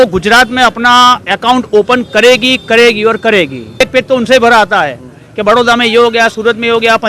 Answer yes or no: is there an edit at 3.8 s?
yes